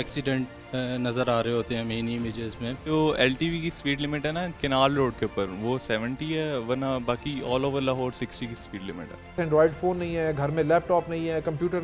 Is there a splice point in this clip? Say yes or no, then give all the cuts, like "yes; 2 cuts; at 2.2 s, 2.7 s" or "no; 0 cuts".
yes; 2 cuts; at 2.8 s, 9.4 s